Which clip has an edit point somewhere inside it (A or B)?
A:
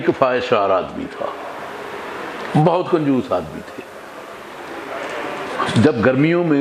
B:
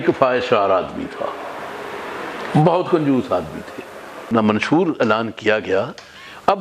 B